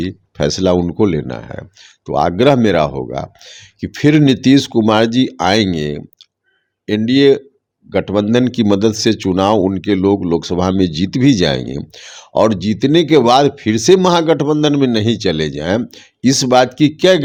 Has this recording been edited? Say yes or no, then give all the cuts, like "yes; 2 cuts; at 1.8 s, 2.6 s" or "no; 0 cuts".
no; 0 cuts